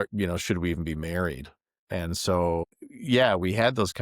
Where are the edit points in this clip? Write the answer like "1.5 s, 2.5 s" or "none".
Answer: 1.8 s, 2.6 s